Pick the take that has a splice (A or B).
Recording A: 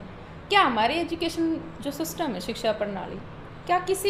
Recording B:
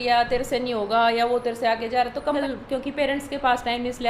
B